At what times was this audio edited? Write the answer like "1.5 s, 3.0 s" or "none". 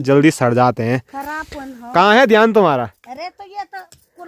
none